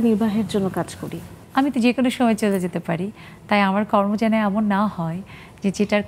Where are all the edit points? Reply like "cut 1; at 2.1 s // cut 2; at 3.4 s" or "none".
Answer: cut 1; at 1.3 s